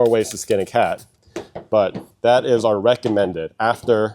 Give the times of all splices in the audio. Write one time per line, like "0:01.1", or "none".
0:02.1